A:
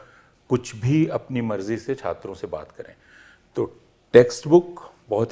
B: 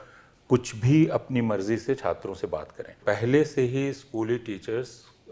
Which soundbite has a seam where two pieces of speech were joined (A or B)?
B